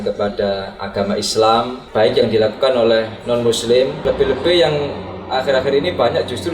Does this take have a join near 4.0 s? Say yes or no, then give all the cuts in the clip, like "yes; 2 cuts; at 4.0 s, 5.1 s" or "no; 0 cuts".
yes; 2 cuts; at 1.8 s, 4.0 s